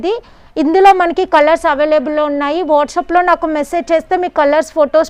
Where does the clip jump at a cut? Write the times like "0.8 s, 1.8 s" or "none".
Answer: none